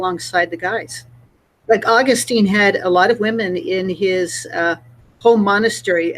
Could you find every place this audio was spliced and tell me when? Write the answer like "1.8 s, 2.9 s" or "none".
1.5 s